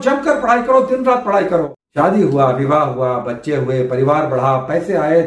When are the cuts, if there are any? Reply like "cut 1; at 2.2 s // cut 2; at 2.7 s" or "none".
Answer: cut 1; at 1.8 s